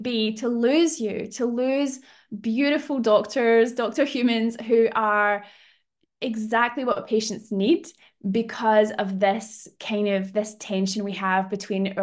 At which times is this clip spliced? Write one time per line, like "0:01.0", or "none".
none